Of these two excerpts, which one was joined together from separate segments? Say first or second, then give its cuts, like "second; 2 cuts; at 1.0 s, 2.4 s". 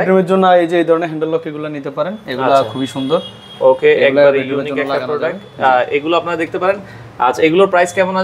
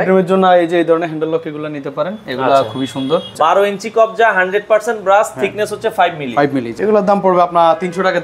second; 2 cuts; at 3.3 s, 6.7 s